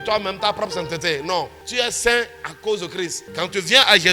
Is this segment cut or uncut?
cut